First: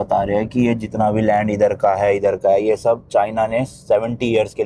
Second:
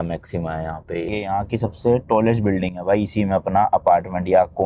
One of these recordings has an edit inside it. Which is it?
second; 1 cut; at 1.1 s

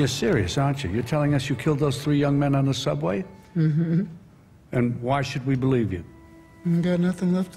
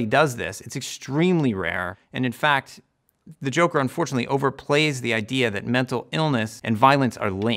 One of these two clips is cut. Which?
second; 1 cut; at 6.5 s

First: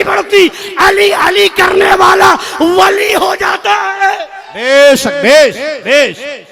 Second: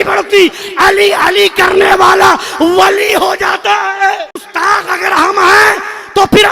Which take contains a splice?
second; 1 cut; at 4.4 s

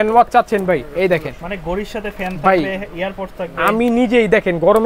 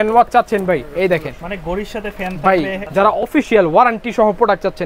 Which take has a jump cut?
second; 1 cut; at 2.8 s

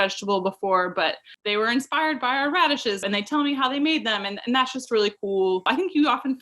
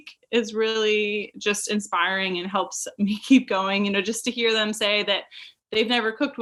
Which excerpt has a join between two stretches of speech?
first; 3 cuts; at 1.3 s, 3.0 s, 5.6 s

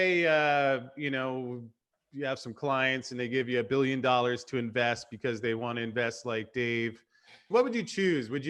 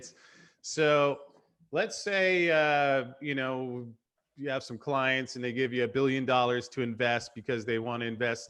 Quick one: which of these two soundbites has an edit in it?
first; 1 cut; at 7.5 s

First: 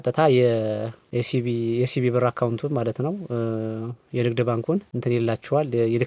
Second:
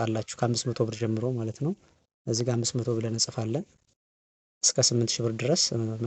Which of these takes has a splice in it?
first; 2 cuts; at 1.0 s, 4.9 s

